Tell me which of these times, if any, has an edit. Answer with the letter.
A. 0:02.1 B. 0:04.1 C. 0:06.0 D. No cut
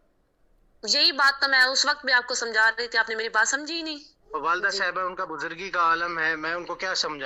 B